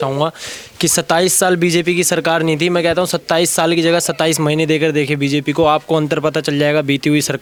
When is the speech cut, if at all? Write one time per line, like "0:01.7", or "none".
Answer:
none